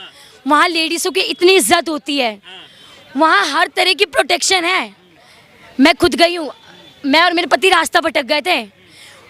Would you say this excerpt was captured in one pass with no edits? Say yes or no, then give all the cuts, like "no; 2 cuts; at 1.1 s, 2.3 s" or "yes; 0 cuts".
yes; 0 cuts